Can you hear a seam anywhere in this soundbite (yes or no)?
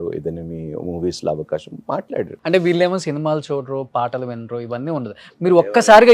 yes